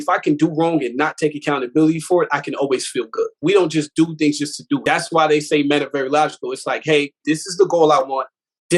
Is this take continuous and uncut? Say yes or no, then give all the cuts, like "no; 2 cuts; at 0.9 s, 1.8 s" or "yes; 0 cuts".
no; 2 cuts; at 3.3 s, 4.8 s